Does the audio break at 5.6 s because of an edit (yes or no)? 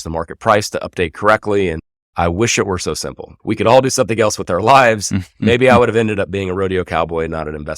no